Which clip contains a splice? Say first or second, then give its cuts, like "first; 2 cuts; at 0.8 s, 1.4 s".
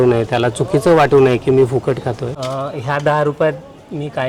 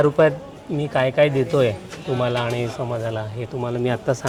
first; 1 cut; at 2.3 s